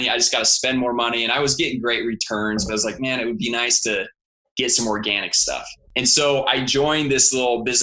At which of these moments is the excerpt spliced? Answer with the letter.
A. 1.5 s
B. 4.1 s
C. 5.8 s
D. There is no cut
C